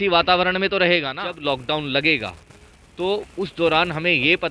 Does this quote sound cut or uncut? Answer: cut